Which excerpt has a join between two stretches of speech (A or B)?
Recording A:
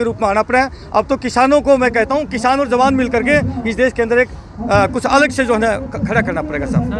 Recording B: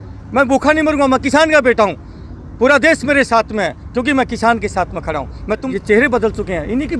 B